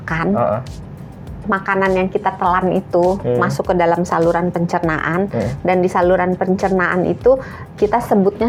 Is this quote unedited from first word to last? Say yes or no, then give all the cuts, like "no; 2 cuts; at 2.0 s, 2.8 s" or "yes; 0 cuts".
yes; 0 cuts